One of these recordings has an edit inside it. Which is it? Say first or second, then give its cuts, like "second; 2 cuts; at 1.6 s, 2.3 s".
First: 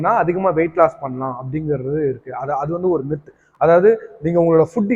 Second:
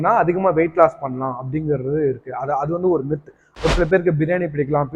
second; 1 cut; at 3.5 s